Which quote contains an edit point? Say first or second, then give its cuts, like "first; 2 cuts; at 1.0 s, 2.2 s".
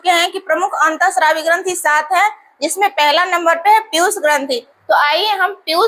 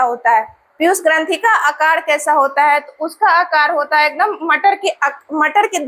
first; 1 cut; at 4.7 s